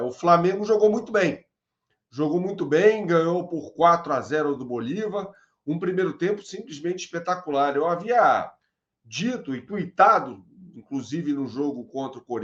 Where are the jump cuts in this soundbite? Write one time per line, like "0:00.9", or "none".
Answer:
none